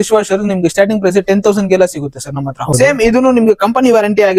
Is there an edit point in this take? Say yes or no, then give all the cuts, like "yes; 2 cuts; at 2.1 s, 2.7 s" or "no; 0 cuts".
yes; 1 cut; at 2.7 s